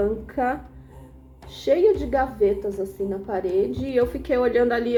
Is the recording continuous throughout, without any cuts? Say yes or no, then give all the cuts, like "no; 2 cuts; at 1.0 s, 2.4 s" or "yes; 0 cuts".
yes; 0 cuts